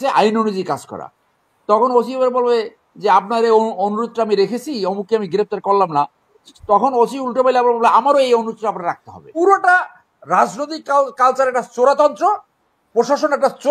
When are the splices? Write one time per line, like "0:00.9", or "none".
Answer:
0:09.3